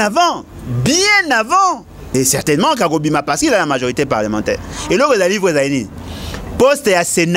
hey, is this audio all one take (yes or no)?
no